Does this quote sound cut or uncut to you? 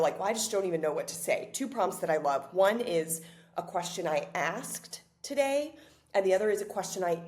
uncut